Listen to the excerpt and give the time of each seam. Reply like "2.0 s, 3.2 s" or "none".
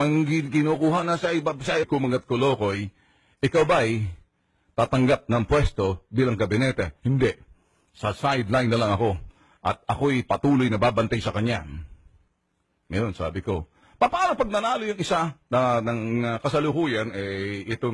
none